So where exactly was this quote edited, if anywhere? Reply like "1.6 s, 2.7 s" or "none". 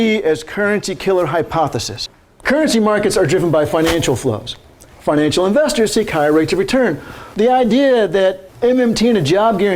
2.1 s, 7.2 s, 8.5 s